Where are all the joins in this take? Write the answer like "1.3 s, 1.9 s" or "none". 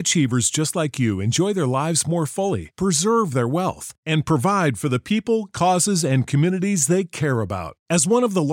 none